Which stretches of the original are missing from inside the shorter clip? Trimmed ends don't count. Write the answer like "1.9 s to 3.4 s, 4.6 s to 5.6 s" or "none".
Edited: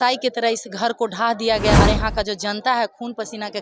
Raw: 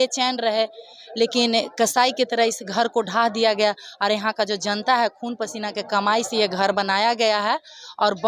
3.7 s to 4.0 s